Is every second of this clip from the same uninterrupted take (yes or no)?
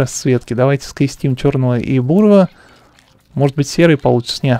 yes